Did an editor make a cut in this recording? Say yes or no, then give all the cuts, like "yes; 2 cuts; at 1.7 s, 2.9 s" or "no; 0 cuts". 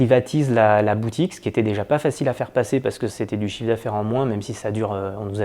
no; 0 cuts